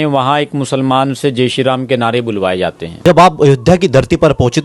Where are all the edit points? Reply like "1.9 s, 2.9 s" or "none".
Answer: 3.0 s